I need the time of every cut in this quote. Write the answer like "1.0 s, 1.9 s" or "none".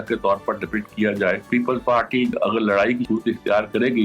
1.4 s, 2.4 s, 3.0 s